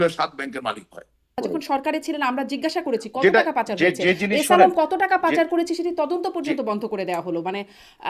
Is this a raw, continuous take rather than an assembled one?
no; 1 cut; at 1.4 s

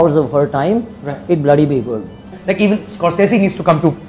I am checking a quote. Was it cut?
yes; 1 cut; at 2.3 s

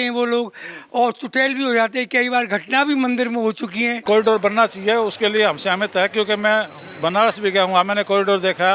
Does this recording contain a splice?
yes; 1 cut; at 4.0 s

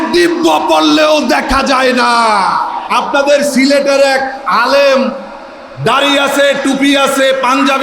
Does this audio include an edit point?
yes; 1 cut; at 2.8 s

